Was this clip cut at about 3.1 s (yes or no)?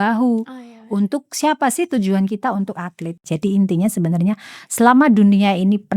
yes